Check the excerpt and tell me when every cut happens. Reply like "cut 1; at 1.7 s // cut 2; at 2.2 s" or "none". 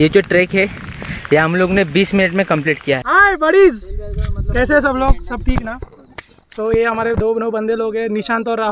cut 1; at 3.0 s